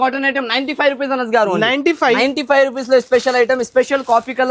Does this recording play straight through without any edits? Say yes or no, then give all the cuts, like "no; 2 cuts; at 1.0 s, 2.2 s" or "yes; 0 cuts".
yes; 0 cuts